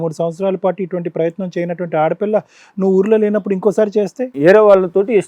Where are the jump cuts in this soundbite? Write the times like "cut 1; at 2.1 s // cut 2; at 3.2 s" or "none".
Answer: cut 1; at 4.3 s